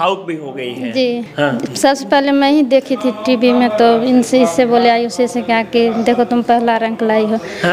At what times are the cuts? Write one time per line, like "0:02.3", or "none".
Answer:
0:01.3